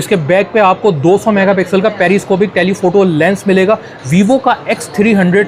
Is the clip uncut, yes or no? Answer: yes